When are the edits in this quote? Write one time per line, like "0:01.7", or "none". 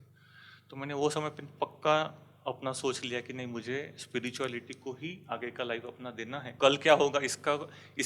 0:06.5